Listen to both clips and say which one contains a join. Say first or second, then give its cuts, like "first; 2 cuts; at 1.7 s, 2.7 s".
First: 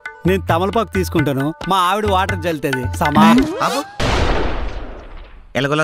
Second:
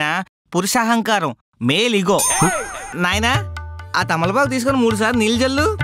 second; 1 cut; at 2.8 s